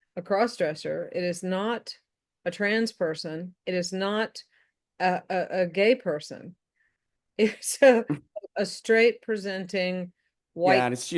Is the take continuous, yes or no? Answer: yes